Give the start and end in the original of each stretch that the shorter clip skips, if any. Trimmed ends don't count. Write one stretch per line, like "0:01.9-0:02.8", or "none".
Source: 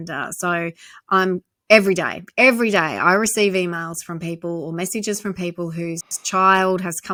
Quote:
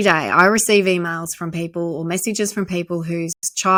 none